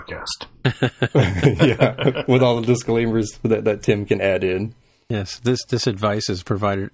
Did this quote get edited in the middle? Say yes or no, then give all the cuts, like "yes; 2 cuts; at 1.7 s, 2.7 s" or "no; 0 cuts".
yes; 1 cut; at 5.0 s